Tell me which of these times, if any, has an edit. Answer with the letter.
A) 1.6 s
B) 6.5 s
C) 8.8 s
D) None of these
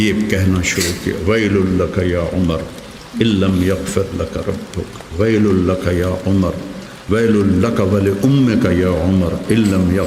D